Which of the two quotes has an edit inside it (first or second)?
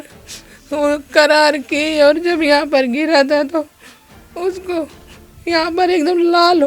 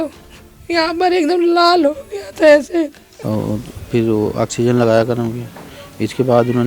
second